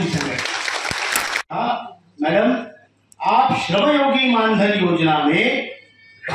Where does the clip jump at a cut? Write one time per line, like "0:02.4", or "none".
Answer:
0:01.3